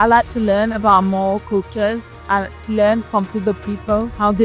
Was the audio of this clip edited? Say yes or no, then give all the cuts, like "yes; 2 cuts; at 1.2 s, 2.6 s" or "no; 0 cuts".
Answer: no; 0 cuts